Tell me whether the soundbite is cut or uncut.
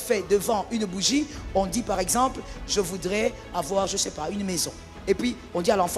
uncut